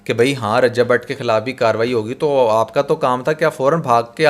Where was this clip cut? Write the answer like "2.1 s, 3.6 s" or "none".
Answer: none